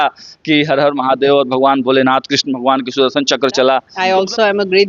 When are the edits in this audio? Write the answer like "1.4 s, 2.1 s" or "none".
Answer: 3.9 s